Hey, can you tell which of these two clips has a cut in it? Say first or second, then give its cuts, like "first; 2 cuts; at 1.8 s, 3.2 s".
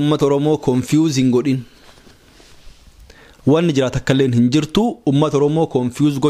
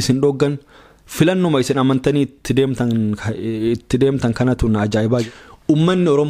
second; 1 cut; at 5.2 s